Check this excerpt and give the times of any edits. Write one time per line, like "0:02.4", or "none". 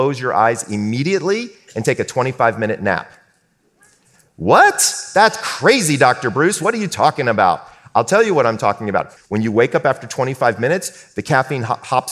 0:09.1